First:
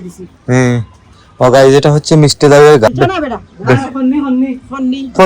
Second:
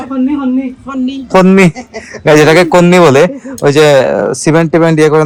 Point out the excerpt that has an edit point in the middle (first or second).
first